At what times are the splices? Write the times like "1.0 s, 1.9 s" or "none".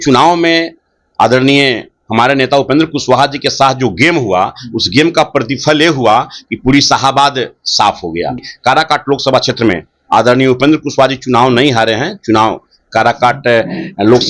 8.5 s